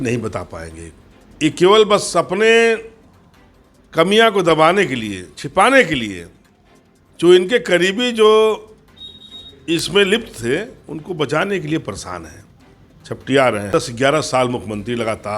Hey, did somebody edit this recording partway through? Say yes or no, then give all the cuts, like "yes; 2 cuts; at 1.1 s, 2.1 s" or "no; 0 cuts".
yes; 1 cut; at 13.6 s